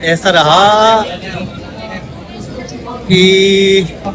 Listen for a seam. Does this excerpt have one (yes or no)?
no